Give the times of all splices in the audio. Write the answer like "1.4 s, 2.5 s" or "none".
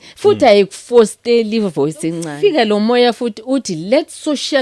2.2 s